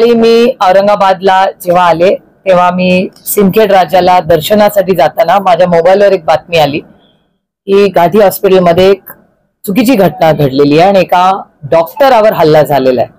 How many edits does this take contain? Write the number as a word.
zero